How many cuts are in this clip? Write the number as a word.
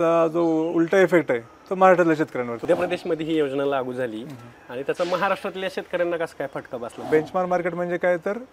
two